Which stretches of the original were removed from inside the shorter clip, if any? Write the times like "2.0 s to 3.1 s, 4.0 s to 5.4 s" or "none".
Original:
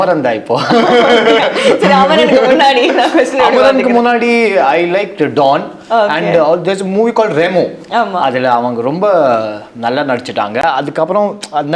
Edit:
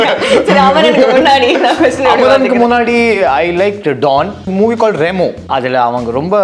5.8 s to 6.8 s, 7.8 s to 8.1 s